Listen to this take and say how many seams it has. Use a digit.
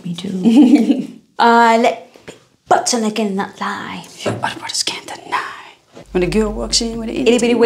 1